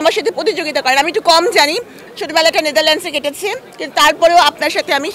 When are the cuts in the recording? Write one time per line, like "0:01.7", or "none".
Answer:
none